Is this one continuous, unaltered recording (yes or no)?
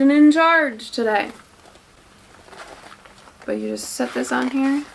yes